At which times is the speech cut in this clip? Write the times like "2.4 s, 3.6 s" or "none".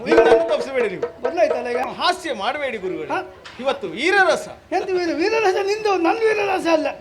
1.9 s